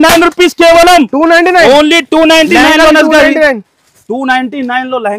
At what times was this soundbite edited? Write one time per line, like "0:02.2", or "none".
none

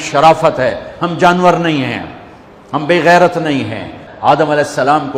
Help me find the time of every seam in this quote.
0:04.0

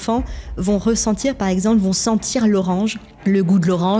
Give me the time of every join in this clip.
0:03.1

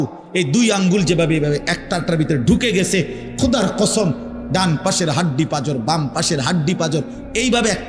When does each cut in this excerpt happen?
none

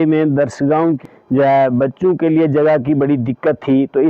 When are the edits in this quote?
0:01.0

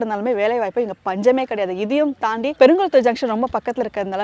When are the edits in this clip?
none

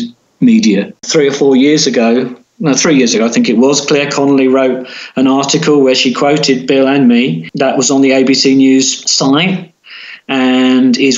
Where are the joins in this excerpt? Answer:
0:01.0
0:07.5
0:09.0

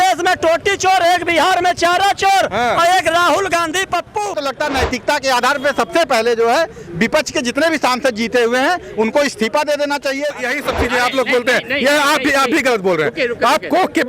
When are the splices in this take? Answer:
0:04.4
0:10.3

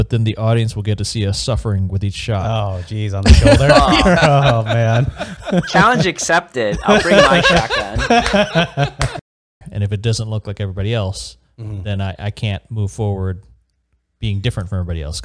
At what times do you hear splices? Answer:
0:09.2

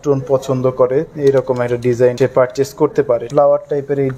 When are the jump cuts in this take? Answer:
0:02.1
0:03.3

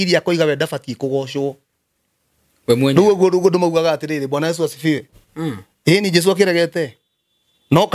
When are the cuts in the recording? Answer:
none

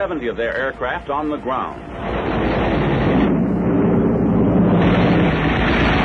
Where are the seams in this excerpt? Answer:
0:04.4

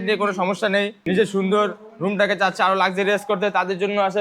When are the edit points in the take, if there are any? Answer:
0:01.0

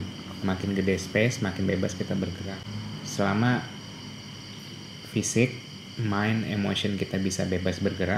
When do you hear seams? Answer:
0:02.7

